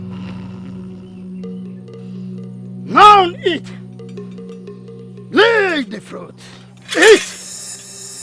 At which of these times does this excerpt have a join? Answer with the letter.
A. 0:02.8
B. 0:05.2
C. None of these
A